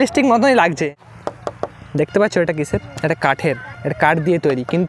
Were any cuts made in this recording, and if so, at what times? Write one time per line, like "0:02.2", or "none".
0:00.9

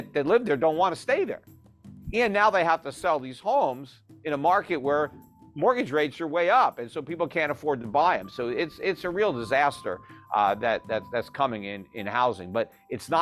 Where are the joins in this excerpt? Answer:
none

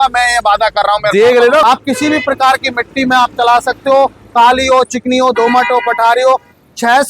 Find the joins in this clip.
0:01.6

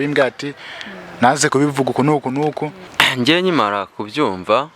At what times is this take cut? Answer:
0:02.9

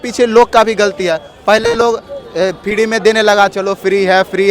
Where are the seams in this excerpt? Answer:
none

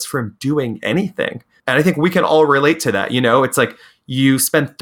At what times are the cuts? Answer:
0:01.5

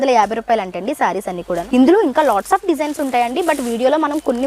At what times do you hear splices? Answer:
0:01.6

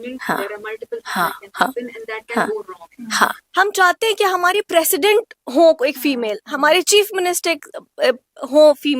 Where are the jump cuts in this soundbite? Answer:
0:03.4

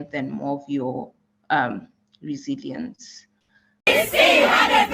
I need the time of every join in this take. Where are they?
0:03.8

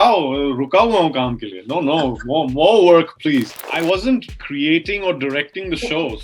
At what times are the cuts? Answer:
0:03.6
0:04.4

